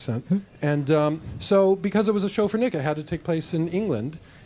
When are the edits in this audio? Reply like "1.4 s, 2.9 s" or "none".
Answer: none